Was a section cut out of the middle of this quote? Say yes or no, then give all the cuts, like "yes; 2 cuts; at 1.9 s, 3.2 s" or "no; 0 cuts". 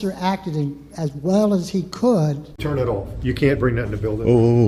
no; 0 cuts